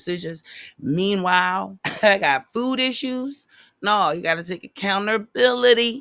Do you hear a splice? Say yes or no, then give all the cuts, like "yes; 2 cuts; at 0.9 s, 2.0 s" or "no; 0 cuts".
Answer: yes; 1 cut; at 1.8 s